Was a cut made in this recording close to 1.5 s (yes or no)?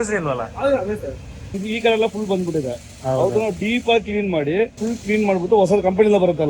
yes